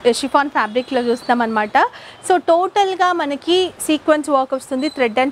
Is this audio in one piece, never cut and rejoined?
yes; 0 cuts

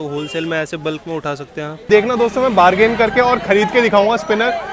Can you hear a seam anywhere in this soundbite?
yes; 1 cut; at 1.9 s

